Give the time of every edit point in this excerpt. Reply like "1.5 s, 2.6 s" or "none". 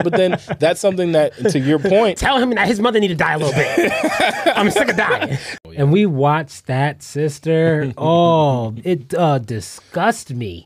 5.5 s